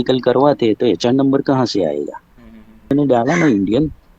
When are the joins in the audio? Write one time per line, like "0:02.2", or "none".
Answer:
0:02.9